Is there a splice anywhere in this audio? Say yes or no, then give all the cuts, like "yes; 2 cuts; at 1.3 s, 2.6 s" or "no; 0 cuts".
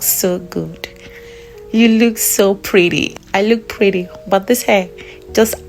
yes; 1 cut; at 3.1 s